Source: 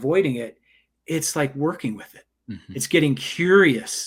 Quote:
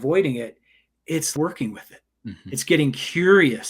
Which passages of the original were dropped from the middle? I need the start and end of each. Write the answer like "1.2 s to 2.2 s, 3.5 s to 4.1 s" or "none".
1.3 s to 1.5 s